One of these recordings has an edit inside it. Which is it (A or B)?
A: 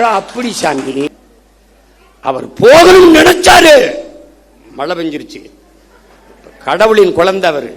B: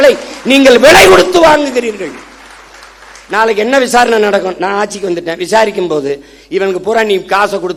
A